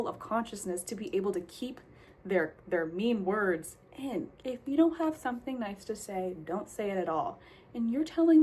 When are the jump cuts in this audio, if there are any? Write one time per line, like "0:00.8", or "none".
0:04.3